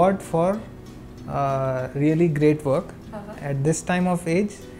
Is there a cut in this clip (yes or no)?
no